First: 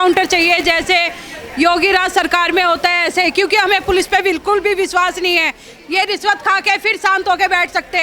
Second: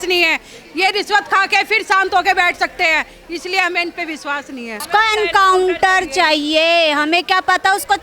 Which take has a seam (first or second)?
second